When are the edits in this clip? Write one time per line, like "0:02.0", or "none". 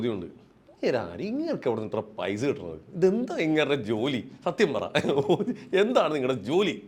none

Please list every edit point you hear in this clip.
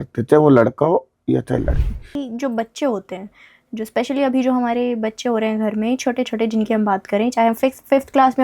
0:02.2

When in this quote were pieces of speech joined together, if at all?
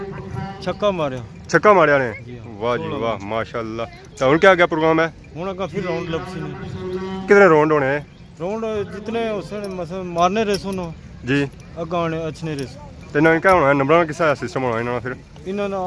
none

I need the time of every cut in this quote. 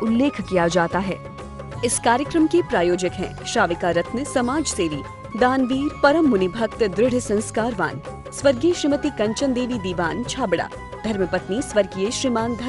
0:01.1

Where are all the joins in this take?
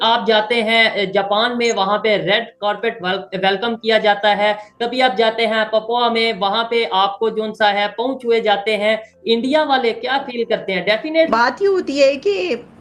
0:11.3

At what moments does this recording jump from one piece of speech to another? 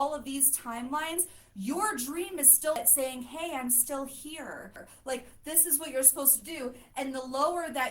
0:02.8
0:04.9

